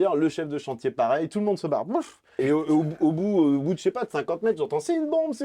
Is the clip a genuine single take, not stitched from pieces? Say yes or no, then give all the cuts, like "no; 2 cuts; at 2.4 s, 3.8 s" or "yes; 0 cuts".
no; 1 cut; at 2.4 s